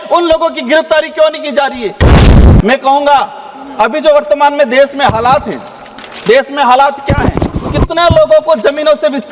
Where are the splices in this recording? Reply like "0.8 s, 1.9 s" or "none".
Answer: 2.2 s